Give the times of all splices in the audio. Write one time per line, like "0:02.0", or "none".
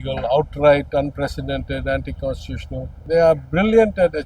0:03.0